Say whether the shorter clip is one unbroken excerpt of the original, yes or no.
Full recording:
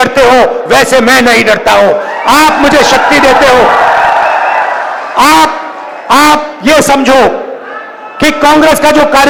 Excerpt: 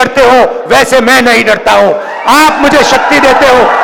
yes